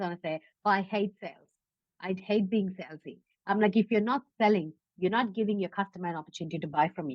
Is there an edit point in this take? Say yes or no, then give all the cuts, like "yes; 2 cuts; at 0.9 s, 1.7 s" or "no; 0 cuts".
yes; 1 cut; at 2.2 s